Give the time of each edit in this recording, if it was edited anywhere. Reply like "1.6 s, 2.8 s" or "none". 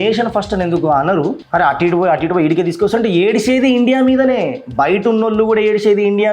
1.4 s